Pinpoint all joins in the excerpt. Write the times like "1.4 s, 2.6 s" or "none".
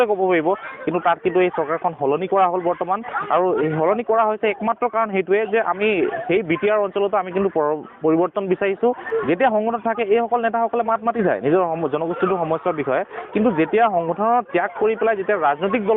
9.0 s